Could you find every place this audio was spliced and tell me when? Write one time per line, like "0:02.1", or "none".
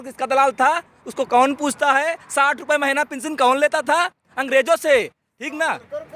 none